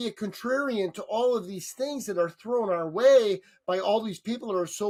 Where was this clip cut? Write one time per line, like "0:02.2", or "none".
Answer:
none